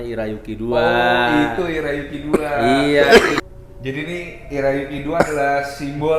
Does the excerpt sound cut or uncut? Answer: cut